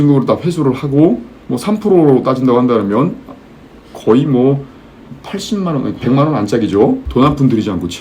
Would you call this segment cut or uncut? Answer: cut